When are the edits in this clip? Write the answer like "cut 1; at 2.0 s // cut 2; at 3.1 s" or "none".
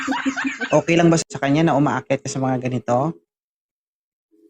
cut 1; at 1.2 s